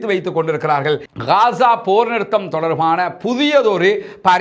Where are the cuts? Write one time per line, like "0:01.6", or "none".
0:01.1